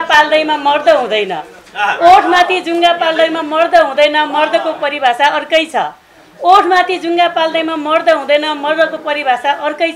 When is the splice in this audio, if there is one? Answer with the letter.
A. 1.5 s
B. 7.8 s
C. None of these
C